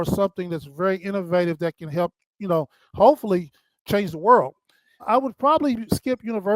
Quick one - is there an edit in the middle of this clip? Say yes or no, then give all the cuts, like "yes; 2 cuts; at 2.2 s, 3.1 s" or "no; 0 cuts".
yes; 2 cuts; at 3.8 s, 5.0 s